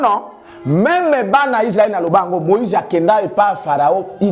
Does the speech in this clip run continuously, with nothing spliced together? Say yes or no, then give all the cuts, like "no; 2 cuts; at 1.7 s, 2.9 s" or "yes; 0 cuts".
yes; 0 cuts